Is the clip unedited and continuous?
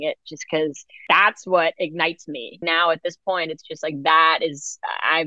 no; 2 cuts; at 0.9 s, 2.6 s

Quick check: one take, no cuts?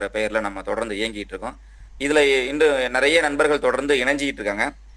yes; 0 cuts

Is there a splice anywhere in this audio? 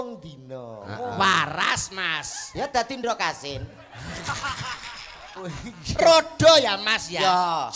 yes; 1 cut; at 5.3 s

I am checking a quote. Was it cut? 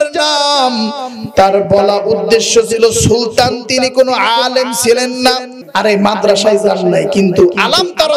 yes; 1 cut; at 5.5 s

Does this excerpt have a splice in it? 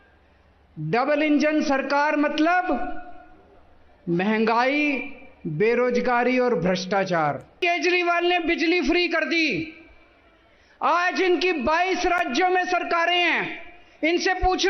yes; 1 cut; at 7.6 s

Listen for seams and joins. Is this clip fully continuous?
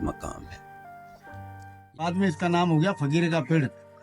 no; 1 cut; at 2.0 s

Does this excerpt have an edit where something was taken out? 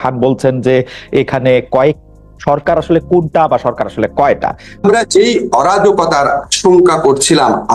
yes; 1 cut; at 4.8 s

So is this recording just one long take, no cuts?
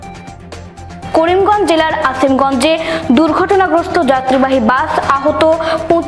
no; 1 cut; at 1.0 s

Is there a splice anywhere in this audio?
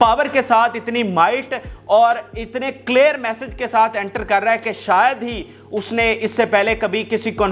no; 0 cuts

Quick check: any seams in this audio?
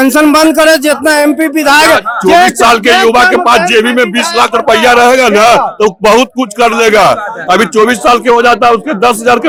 no; 0 cuts

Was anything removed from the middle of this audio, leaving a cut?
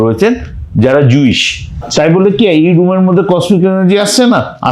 yes; 1 cut; at 1.9 s

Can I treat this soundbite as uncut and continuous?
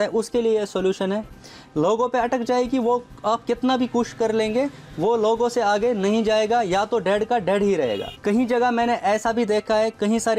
no; 2 cuts; at 1.3 s, 8.1 s

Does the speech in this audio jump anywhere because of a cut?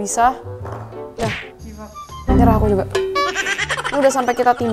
no; 0 cuts

